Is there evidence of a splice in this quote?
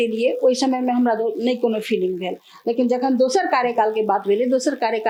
no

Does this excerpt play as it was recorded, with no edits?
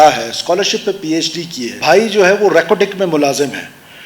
no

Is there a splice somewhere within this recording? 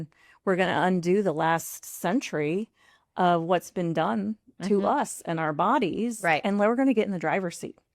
no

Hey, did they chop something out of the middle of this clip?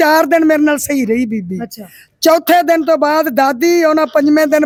no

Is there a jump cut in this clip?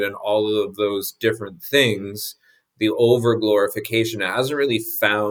no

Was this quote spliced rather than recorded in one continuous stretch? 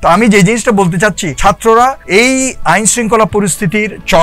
yes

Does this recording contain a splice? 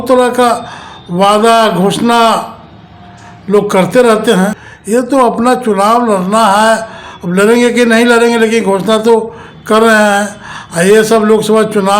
yes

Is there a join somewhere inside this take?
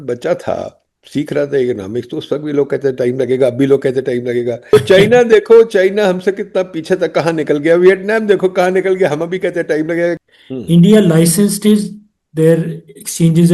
yes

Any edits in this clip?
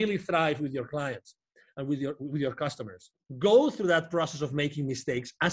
yes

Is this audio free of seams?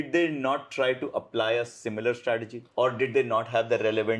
yes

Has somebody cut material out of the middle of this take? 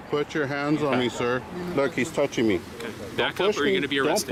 no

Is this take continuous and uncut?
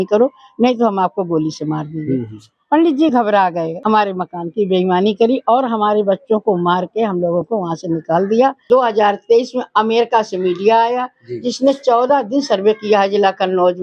no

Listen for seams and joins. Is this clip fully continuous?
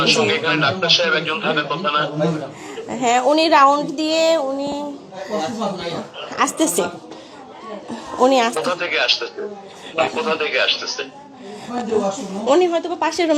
yes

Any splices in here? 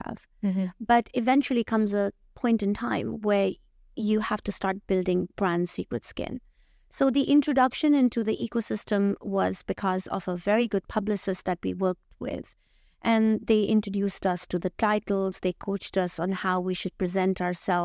no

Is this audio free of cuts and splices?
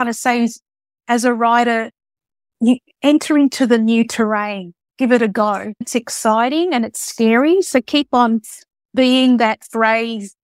no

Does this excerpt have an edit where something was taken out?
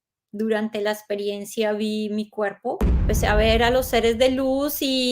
yes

